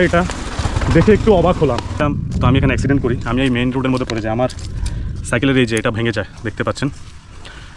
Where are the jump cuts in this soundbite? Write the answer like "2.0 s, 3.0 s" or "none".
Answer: 2.0 s